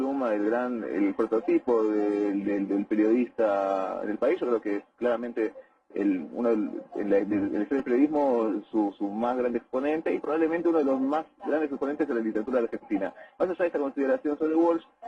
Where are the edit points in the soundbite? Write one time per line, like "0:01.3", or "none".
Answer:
0:02.5

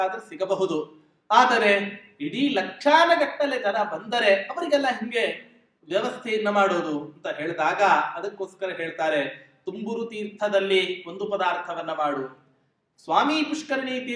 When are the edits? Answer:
none

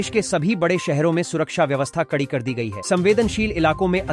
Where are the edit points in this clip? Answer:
none

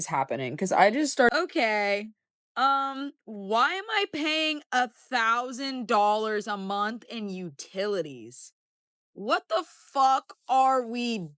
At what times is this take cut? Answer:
0:01.3

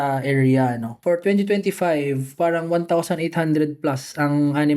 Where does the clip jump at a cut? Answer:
0:00.9

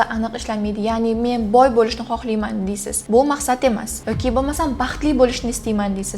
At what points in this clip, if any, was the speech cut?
none

